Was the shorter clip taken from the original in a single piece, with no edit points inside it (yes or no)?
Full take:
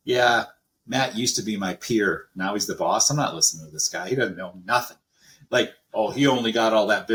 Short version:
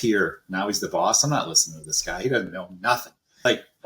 no